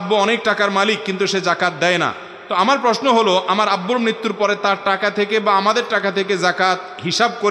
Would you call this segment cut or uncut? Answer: uncut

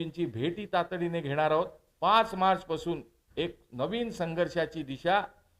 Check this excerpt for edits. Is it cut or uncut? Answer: cut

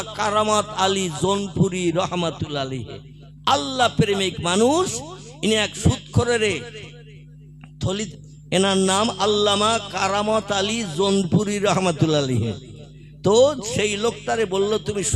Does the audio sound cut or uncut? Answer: cut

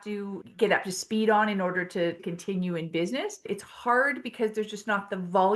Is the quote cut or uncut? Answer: cut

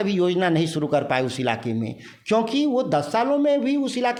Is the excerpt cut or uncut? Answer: uncut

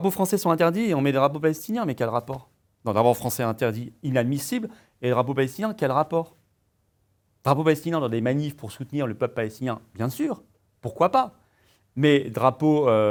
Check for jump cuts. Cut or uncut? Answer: uncut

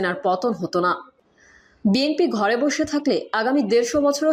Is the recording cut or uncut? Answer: uncut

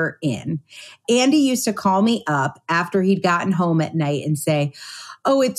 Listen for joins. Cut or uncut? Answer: cut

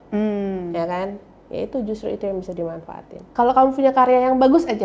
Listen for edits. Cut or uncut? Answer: cut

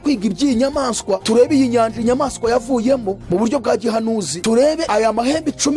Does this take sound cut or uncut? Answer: cut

